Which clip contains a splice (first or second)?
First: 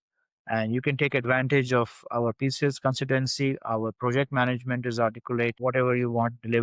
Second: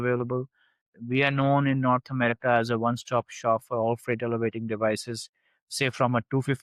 first